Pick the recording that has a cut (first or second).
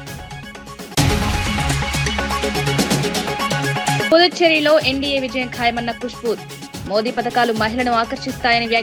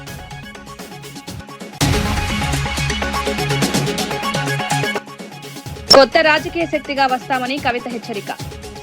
second